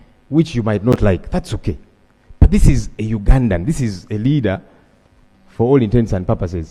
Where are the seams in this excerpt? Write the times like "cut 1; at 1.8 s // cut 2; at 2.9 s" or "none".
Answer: none

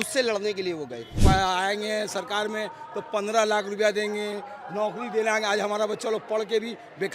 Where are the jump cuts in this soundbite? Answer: cut 1; at 1.2 s

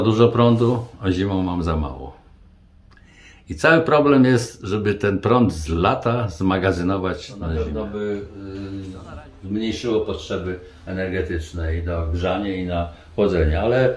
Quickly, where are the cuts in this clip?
cut 1; at 7.6 s

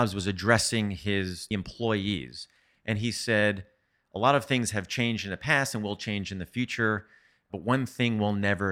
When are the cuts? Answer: cut 1; at 1.4 s

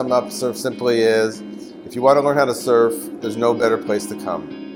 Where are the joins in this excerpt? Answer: none

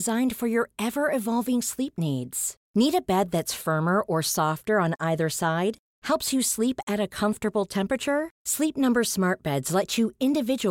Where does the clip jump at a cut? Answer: none

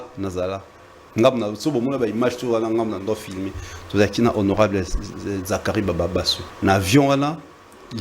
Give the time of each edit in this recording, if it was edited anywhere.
cut 1; at 6.4 s

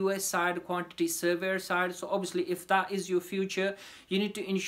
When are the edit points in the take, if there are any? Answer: none

